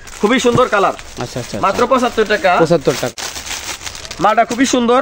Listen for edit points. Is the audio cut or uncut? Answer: cut